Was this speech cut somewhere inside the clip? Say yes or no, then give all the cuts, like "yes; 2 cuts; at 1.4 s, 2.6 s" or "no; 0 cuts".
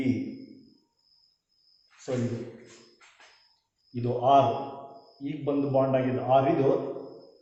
no; 0 cuts